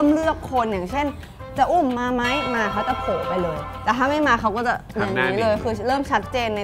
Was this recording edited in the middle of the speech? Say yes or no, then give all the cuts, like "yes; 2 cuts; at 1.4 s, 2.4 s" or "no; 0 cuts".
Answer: no; 0 cuts